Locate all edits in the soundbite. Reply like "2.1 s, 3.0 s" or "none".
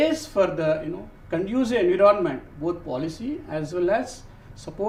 none